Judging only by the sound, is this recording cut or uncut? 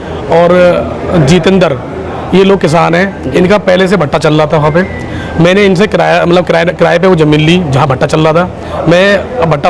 uncut